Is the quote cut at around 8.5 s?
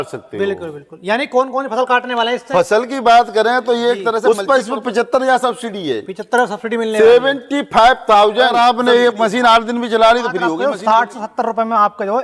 yes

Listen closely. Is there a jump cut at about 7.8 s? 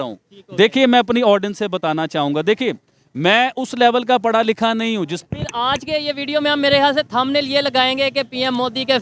no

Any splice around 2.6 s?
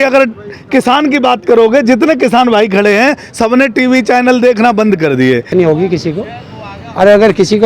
no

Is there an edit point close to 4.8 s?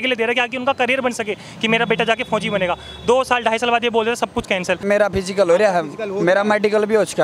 yes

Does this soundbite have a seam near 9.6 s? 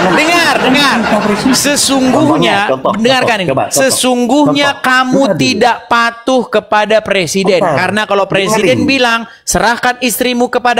no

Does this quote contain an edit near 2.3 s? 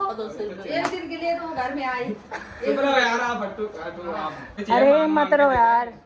no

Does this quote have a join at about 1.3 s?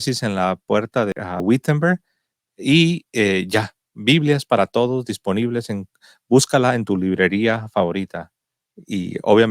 yes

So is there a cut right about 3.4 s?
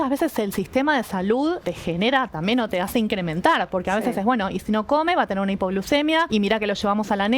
no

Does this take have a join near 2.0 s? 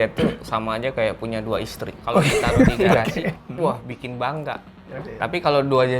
no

